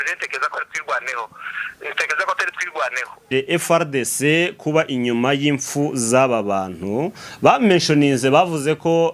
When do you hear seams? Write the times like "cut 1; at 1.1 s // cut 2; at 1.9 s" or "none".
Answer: cut 1; at 3.2 s